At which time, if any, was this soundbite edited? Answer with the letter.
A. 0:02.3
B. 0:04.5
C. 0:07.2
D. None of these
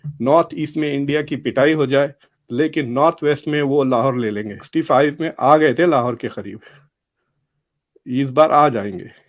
B